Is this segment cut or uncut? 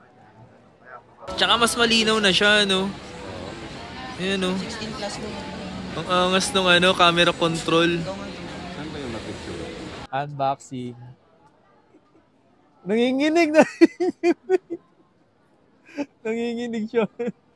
cut